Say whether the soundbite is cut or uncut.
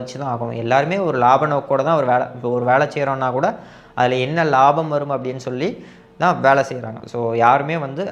uncut